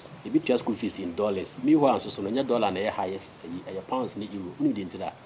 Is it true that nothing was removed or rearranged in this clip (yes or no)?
yes